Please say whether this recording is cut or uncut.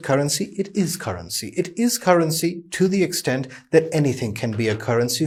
uncut